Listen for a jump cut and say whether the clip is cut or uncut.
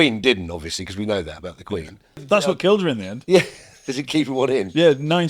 cut